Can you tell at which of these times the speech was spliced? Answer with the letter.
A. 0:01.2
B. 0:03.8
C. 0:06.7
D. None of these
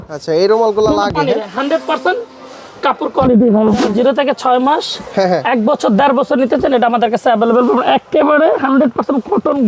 B